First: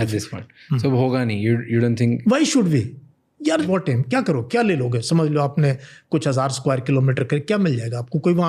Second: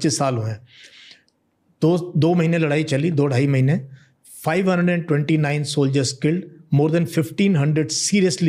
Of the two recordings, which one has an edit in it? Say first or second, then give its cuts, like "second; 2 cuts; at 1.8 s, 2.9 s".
first; 1 cut; at 3.7 s